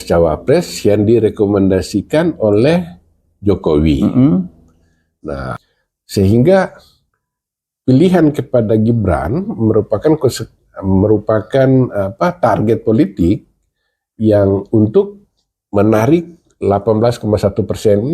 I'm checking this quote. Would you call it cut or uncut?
cut